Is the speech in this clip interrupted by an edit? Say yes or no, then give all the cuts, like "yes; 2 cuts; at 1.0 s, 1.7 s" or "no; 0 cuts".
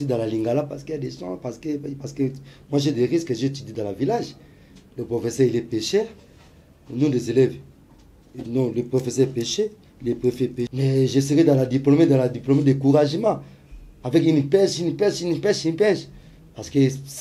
yes; 1 cut; at 10.7 s